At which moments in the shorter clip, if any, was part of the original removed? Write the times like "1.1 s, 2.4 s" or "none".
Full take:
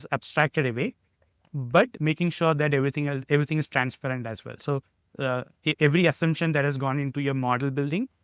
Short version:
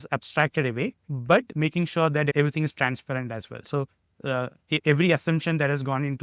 1.1 s, 2.3 s